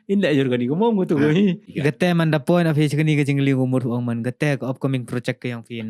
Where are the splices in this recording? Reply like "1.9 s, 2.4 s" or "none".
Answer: 1.7 s